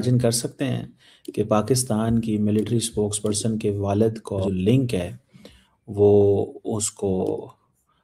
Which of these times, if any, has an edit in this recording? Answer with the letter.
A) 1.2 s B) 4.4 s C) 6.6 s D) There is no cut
B